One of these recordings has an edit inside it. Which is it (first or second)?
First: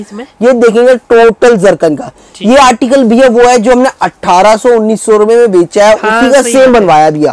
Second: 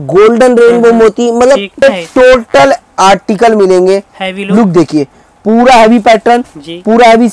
second